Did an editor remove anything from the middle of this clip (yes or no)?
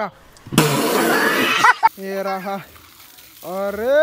yes